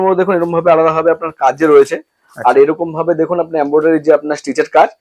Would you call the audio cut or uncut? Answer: uncut